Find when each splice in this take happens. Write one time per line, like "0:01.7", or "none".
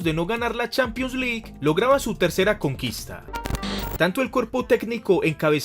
0:03.5